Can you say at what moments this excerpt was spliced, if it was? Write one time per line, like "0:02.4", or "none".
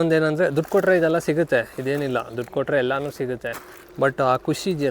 none